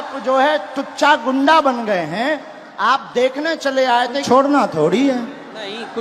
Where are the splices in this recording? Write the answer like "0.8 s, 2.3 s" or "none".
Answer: 4.2 s